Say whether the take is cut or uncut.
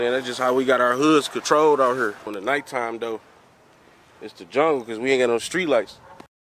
uncut